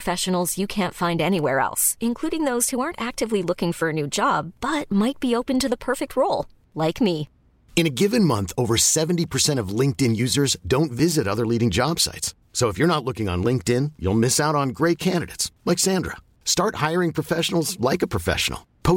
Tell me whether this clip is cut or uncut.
uncut